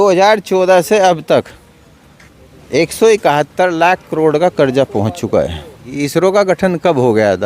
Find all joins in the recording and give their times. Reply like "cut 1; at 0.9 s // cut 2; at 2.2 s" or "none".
cut 1; at 5.9 s